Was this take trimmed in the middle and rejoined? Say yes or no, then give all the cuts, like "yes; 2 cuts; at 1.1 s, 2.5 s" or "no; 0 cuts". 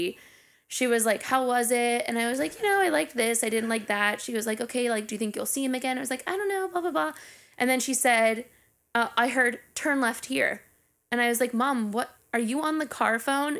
no; 0 cuts